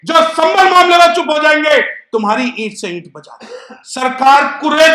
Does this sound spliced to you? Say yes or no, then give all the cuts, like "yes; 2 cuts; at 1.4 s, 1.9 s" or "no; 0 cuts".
yes; 1 cut; at 4.0 s